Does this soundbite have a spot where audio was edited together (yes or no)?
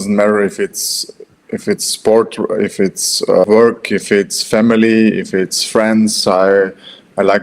yes